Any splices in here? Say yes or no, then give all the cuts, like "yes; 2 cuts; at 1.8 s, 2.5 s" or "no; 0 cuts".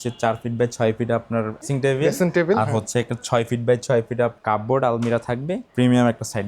yes; 3 cuts; at 1.7 s, 4.4 s, 5.6 s